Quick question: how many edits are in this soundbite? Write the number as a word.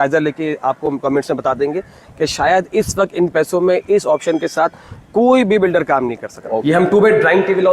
one